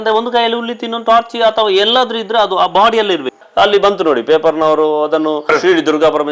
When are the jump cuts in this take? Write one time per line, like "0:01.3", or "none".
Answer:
0:03.4
0:05.4